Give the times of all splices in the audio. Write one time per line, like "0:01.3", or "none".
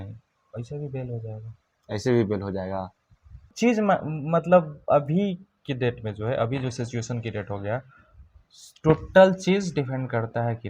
none

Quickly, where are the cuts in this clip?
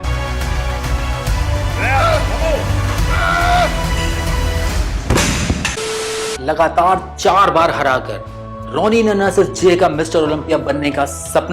0:05.8

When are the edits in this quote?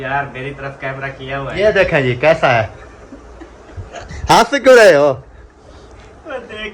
0:01.4

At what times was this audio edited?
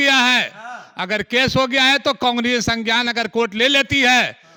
none

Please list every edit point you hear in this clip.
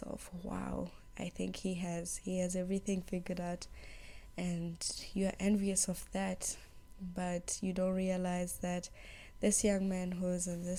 none

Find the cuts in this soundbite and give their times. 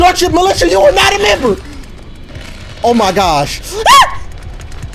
none

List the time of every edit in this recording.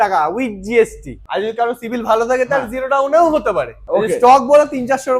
0:01.2
0:03.8

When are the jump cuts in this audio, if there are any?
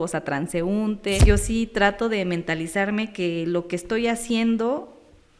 0:01.2

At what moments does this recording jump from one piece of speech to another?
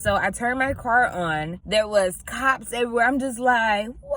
0:01.6

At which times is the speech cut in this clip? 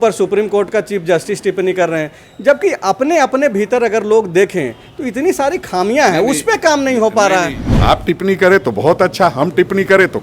0:07.6

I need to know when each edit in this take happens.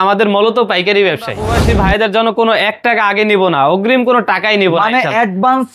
0:01.5

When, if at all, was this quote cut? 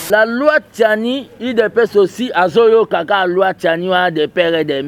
none

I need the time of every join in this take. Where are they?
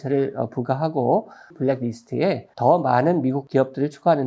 0:01.5
0:02.5
0:03.4

